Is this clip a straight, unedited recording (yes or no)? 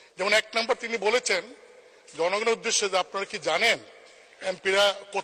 yes